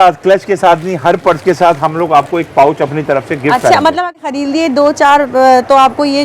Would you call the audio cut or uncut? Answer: cut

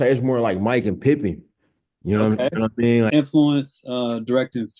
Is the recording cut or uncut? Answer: cut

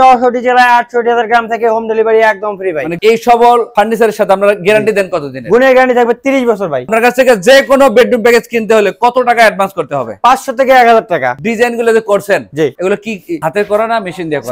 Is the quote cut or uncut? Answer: cut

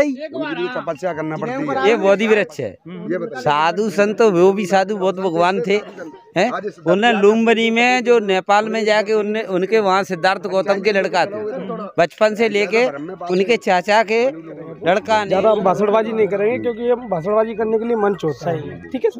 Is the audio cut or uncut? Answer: cut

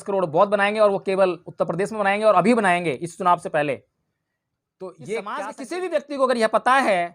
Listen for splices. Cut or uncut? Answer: cut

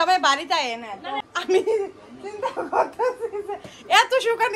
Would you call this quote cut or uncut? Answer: cut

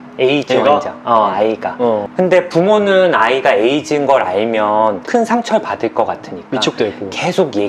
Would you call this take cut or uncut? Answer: uncut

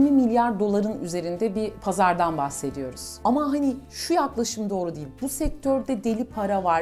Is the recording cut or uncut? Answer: cut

